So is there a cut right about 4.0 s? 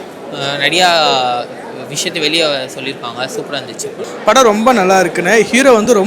yes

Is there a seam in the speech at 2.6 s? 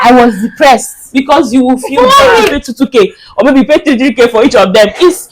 yes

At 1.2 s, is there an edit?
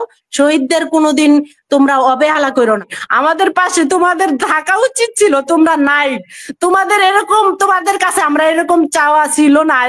no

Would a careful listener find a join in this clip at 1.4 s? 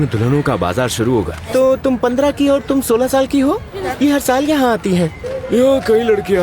yes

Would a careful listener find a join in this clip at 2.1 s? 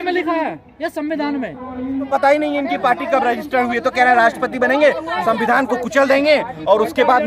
yes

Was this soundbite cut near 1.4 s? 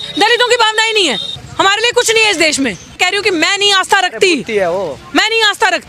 yes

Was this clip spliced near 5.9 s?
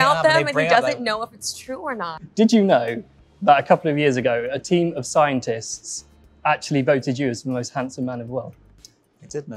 no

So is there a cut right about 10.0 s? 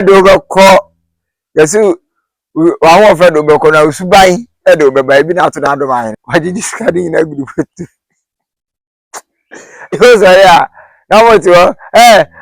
yes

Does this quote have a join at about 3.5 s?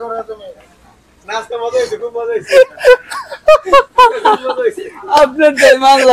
no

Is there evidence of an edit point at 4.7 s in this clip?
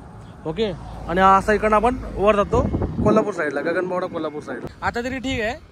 yes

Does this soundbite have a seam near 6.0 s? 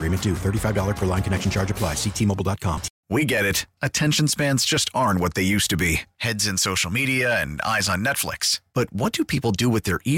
no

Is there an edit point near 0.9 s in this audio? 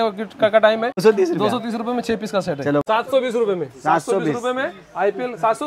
yes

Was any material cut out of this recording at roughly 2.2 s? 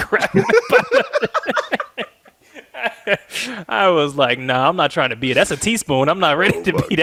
no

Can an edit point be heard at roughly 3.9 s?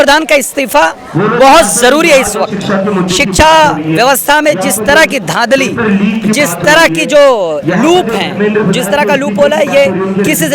no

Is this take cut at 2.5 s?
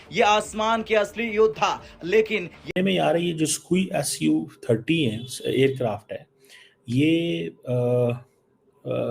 yes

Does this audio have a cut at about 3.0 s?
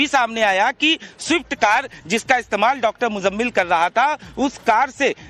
yes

